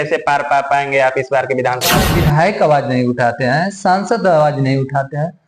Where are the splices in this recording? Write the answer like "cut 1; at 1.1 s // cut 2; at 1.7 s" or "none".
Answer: cut 1; at 2.0 s